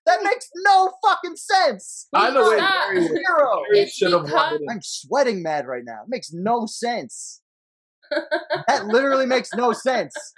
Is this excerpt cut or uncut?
cut